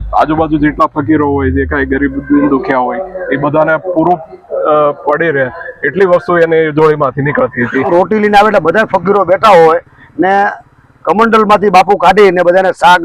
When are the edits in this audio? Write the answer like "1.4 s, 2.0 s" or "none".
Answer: 7.9 s